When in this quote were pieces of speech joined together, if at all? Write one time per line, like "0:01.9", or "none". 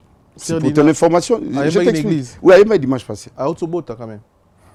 none

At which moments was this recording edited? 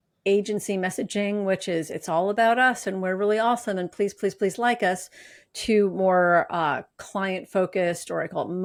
none

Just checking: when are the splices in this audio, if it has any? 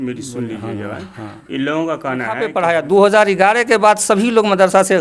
0:02.6

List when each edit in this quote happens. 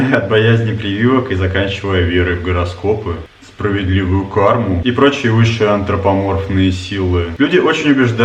none

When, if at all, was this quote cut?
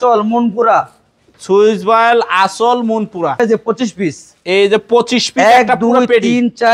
0:03.4

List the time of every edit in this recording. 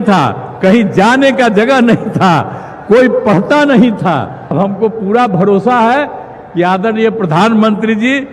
0:04.5

